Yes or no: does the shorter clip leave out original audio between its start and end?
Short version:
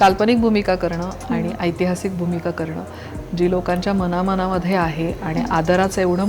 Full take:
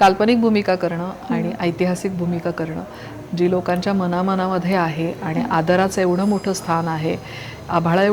no